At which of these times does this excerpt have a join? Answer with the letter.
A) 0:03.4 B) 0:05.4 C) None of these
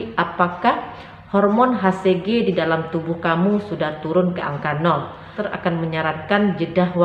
B